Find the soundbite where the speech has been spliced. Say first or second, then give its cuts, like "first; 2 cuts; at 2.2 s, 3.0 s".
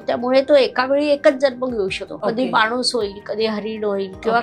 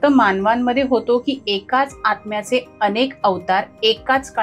first; 1 cut; at 2.1 s